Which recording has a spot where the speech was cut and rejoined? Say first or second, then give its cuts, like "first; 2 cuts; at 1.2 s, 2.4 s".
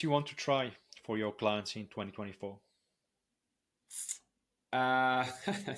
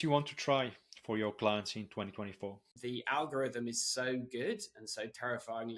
second; 1 cut; at 2.7 s